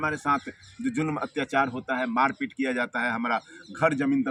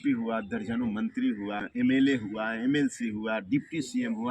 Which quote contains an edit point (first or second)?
second